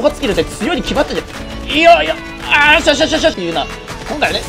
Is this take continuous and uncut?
no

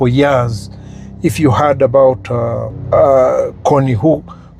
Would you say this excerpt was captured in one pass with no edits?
yes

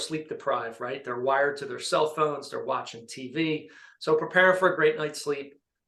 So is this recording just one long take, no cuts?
yes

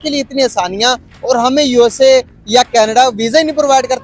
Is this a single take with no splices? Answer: yes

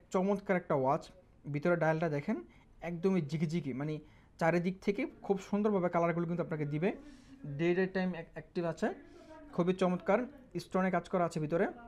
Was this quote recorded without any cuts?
yes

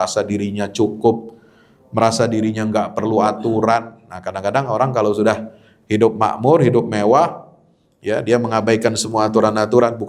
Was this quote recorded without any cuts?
yes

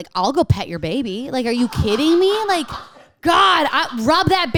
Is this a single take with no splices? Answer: yes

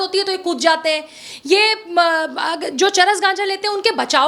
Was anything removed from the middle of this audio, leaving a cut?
no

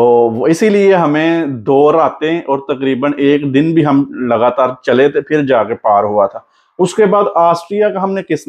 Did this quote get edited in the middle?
no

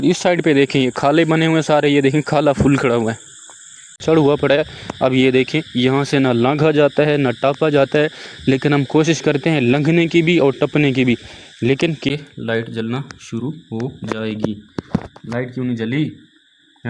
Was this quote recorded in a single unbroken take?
no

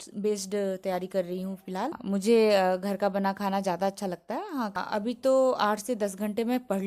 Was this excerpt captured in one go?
no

